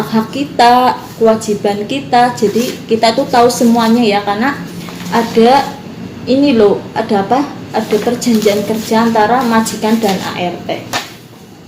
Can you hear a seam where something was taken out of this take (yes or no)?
no